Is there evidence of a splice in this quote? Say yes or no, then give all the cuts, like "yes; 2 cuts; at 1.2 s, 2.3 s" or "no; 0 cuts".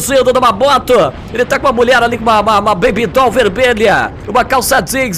no; 0 cuts